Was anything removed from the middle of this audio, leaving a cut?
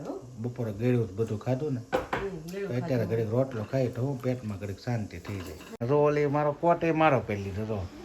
yes; 1 cut; at 5.8 s

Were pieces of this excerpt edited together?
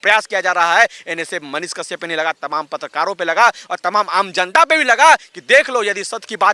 no; 0 cuts

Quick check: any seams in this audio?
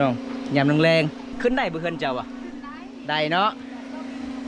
yes; 1 cut; at 1.3 s

